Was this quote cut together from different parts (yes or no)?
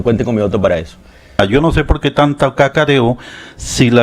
yes